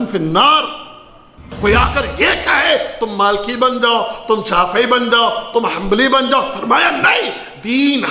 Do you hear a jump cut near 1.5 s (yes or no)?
yes